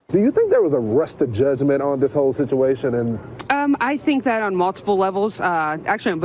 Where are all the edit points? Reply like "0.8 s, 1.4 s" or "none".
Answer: none